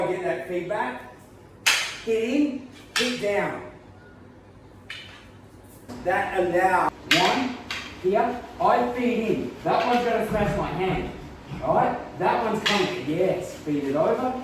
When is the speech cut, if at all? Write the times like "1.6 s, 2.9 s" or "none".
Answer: 6.9 s

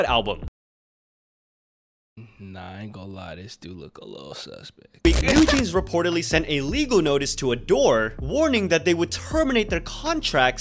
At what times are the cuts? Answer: 5.1 s

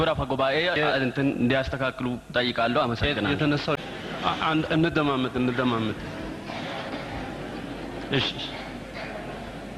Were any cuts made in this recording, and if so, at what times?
3.8 s

